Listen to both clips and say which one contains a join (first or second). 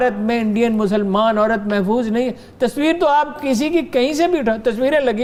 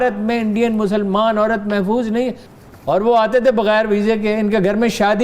second